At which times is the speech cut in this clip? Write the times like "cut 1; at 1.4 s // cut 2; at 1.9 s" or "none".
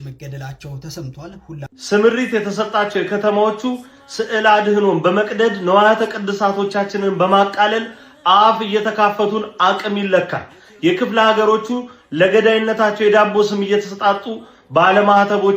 cut 1; at 1.8 s